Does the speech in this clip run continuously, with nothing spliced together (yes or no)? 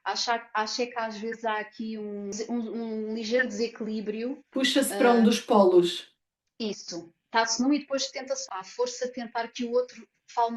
no